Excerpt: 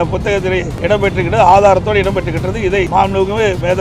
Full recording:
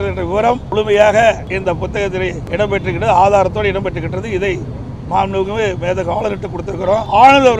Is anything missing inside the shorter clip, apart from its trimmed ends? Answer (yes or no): yes